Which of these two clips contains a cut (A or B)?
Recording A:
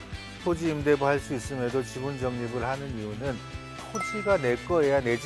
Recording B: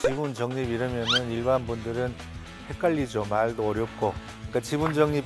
B